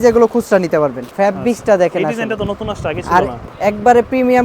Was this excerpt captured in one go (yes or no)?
no